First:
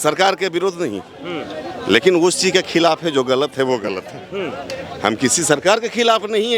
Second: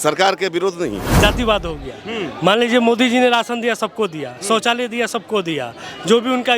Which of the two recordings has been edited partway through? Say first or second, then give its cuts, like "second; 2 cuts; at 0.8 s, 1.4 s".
second; 1 cut; at 1.0 s